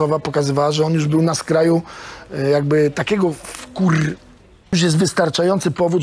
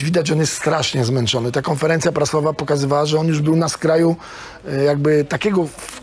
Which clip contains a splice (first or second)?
first